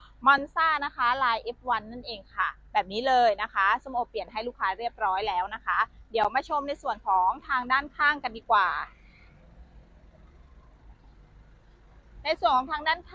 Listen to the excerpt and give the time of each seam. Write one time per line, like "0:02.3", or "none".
none